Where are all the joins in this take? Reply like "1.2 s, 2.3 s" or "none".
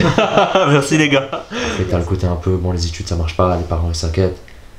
1.4 s

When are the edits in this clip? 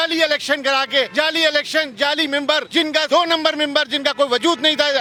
none

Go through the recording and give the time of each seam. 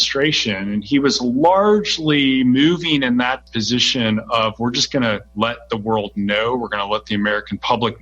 3.4 s, 5.3 s

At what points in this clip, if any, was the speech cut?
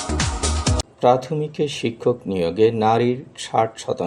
0.9 s

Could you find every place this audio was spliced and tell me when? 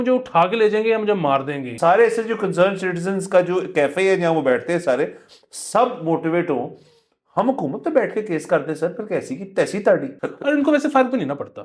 1.7 s, 10.2 s

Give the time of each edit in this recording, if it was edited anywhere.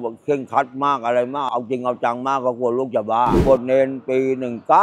1.5 s, 3.4 s

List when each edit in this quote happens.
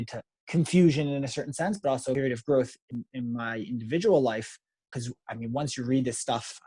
2.2 s, 2.8 s, 4.9 s

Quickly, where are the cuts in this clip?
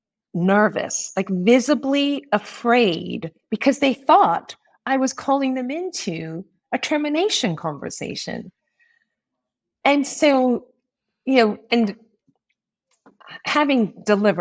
none

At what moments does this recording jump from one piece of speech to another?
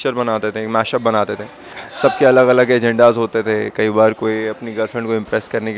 1.7 s

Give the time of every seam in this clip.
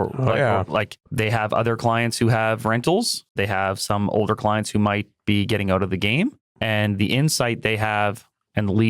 1.0 s, 3.2 s, 6.5 s

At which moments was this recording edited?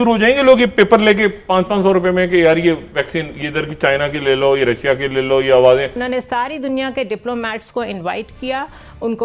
6.0 s

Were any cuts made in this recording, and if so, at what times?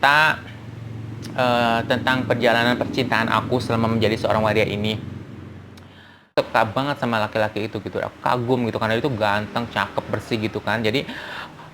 6.3 s

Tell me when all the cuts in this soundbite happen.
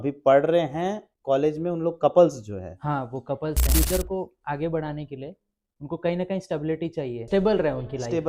3.6 s, 7.2 s

